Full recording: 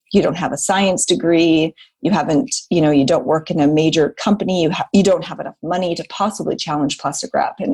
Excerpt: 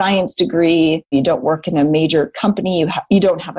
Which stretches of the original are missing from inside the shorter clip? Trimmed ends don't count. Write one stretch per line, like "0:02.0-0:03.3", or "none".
0:01.8-0:02.9